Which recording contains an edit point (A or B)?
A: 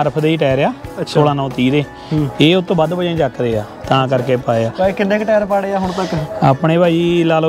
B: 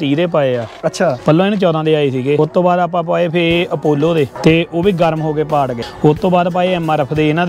B